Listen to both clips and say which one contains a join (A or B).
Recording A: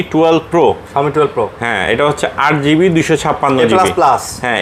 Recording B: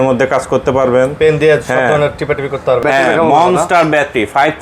B